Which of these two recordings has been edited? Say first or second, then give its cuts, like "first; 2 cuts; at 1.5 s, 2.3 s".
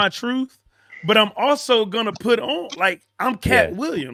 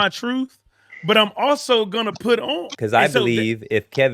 second; 1 cut; at 2.7 s